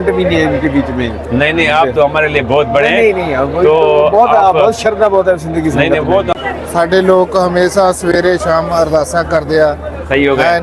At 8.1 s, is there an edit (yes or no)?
no